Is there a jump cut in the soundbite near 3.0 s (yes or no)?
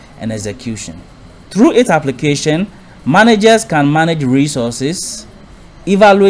no